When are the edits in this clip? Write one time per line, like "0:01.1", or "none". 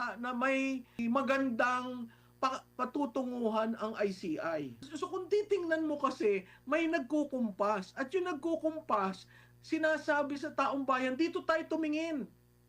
0:01.0
0:04.8